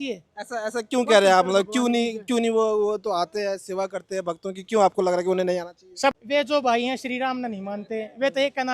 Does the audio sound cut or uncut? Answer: cut